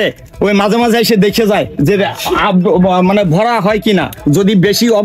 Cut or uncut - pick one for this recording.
uncut